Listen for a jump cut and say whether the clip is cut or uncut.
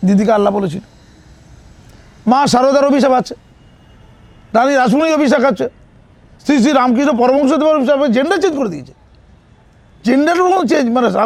uncut